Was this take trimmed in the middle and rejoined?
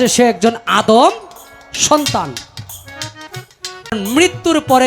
yes; 1 cut; at 3.9 s

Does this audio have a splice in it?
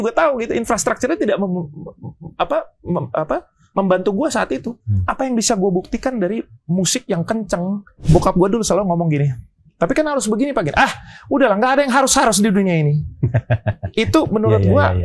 yes; 1 cut; at 7.9 s

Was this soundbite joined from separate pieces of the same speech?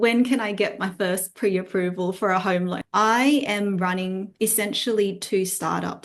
yes; 1 cut; at 2.8 s

